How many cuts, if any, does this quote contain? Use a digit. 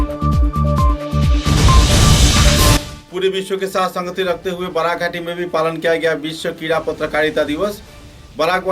1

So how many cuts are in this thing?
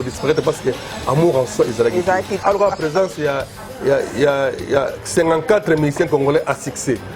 1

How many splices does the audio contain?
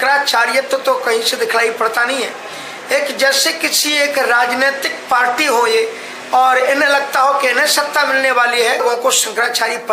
1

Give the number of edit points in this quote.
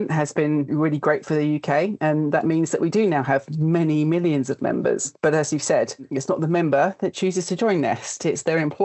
1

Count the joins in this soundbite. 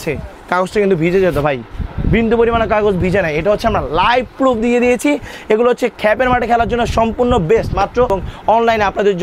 1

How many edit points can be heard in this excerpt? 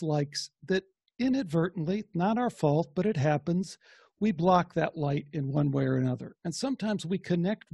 1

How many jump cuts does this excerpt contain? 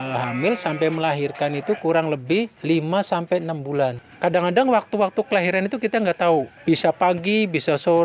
3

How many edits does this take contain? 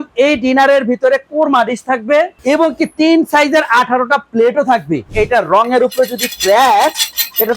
2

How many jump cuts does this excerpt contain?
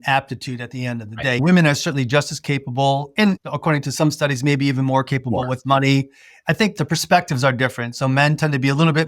3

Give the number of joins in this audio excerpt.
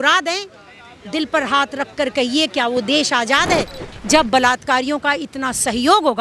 1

